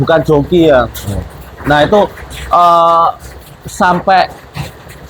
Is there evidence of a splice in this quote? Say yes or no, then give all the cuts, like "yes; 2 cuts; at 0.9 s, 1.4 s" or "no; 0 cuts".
no; 0 cuts